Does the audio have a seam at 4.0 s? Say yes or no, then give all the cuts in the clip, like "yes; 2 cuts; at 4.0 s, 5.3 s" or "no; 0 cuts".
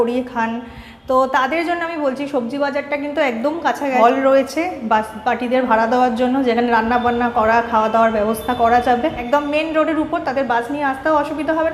yes; 2 cuts; at 4.0 s, 9.2 s